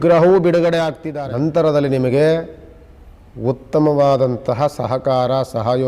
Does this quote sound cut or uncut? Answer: cut